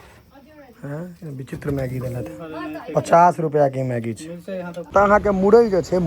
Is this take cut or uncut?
cut